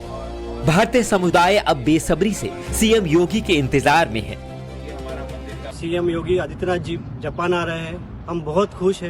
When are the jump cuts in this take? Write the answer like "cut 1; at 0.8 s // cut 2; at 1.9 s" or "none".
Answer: cut 1; at 1.1 s